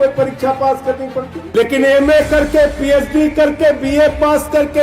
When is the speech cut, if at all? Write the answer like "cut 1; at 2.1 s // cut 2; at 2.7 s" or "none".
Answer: cut 1; at 1.4 s